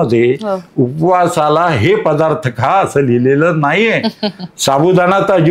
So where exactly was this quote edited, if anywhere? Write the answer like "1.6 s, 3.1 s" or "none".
none